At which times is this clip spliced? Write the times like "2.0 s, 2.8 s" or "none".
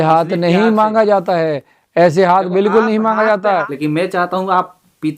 3.4 s